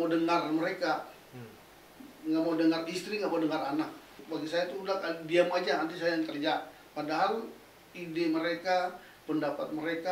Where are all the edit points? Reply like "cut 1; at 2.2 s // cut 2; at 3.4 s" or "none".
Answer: cut 1; at 4.2 s